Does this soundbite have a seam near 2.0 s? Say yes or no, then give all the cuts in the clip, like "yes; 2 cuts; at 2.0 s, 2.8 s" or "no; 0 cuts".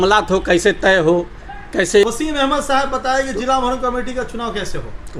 yes; 1 cut; at 2.0 s